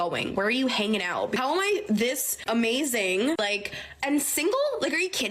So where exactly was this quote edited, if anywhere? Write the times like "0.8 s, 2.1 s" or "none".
1.4 s